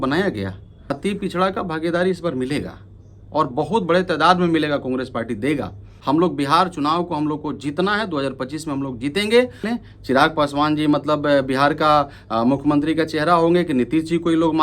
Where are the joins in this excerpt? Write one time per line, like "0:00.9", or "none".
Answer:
0:00.9
0:05.9
0:09.7